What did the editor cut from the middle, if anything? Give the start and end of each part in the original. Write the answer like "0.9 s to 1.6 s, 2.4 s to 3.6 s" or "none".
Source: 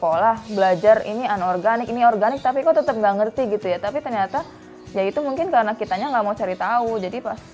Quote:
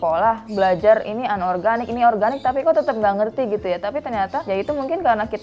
4.4 s to 4.9 s